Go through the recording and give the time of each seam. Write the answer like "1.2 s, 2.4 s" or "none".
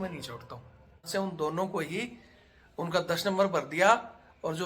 1.1 s